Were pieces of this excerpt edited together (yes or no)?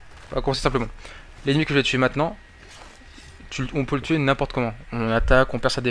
yes